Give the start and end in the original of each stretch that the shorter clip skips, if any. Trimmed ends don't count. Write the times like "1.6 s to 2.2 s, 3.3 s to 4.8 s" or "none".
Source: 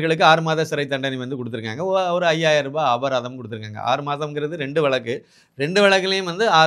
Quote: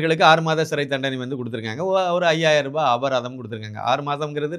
none